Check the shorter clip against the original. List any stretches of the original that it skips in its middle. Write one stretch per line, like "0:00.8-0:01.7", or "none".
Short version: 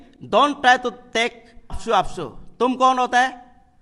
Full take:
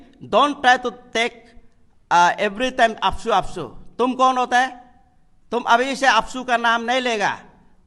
0:01.8-0:03.2